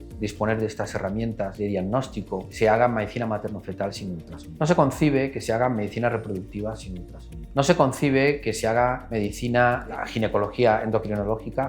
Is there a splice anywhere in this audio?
no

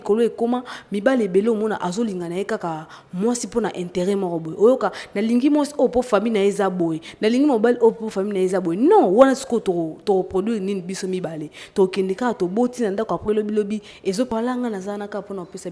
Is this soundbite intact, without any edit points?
no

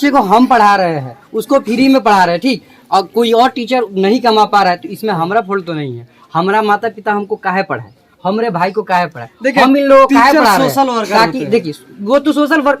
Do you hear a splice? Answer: no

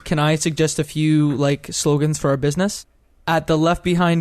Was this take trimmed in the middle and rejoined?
yes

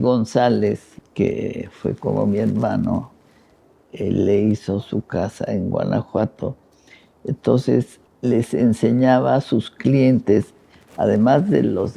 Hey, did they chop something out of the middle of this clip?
yes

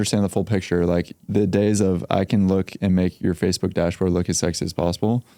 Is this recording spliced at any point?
yes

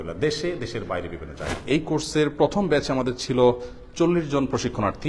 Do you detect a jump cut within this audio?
yes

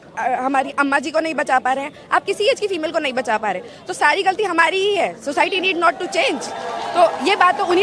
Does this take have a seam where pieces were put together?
no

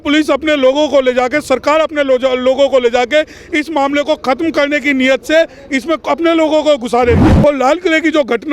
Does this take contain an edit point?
yes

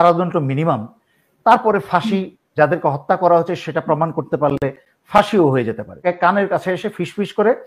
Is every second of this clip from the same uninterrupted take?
no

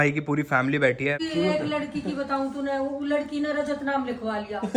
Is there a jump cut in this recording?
yes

